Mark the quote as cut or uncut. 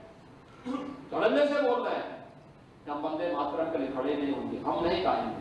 uncut